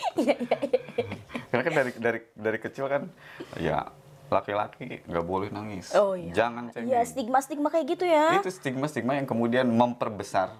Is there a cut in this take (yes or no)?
no